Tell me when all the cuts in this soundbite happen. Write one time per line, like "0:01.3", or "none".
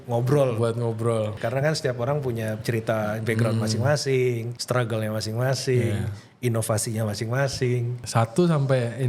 0:01.4
0:02.6
0:04.5
0:08.0